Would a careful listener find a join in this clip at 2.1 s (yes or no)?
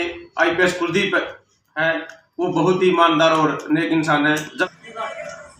no